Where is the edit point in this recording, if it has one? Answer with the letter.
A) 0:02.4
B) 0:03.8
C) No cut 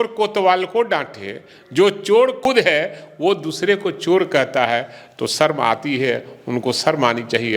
A